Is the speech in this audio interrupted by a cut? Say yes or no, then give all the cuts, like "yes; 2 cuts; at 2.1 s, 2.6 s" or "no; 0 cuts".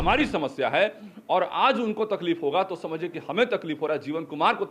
no; 0 cuts